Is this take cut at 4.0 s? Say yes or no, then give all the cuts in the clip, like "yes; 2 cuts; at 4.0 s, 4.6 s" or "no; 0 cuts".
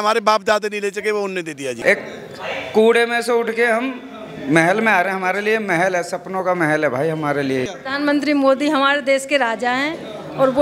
no; 2 cuts; at 1.8 s, 7.7 s